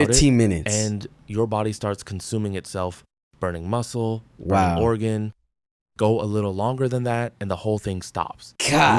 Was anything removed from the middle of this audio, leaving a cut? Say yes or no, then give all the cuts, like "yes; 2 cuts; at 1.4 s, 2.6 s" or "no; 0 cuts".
no; 0 cuts